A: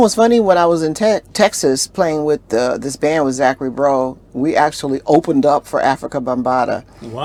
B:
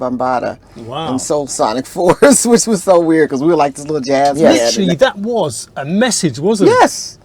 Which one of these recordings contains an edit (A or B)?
B